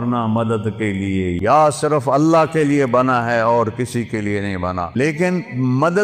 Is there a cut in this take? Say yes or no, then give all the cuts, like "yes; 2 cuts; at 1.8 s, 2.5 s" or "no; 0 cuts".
yes; 2 cuts; at 1.4 s, 5.0 s